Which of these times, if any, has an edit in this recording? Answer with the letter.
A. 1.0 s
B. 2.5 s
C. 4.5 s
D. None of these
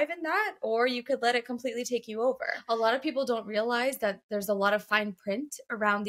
B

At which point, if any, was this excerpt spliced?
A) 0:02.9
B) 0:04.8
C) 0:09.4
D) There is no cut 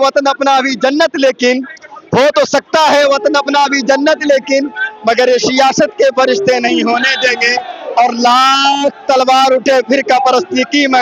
D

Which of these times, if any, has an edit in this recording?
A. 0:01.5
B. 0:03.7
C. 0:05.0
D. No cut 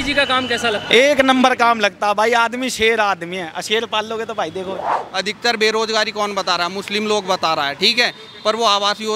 C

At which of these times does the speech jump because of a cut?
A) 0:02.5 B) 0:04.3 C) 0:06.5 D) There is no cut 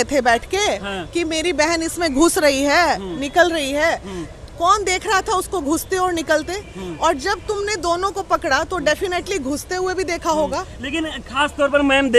D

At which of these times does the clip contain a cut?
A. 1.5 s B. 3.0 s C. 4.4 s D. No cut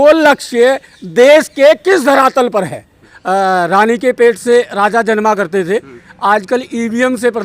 B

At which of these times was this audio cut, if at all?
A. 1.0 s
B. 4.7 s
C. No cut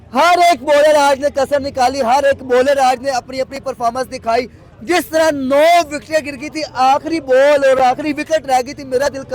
C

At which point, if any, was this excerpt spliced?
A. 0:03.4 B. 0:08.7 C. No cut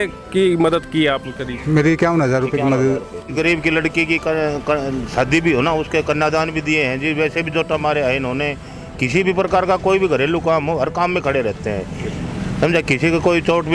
A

